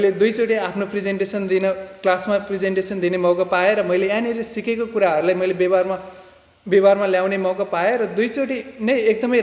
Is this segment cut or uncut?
uncut